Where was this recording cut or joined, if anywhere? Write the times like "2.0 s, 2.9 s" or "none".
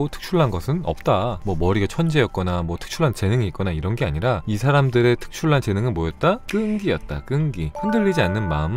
1.4 s, 4.4 s, 6.4 s, 7.7 s